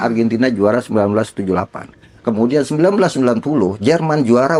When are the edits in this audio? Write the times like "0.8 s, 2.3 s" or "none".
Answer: none